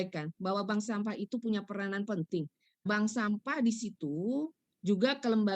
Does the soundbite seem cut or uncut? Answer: cut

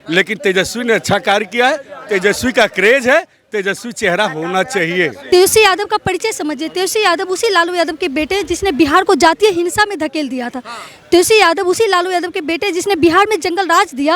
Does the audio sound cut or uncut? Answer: cut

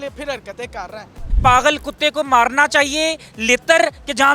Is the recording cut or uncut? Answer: cut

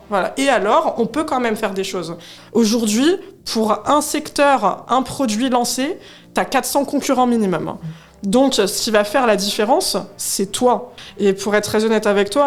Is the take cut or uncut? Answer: cut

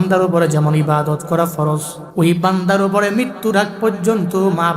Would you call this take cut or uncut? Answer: cut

